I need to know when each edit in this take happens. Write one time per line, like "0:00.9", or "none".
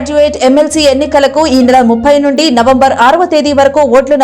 none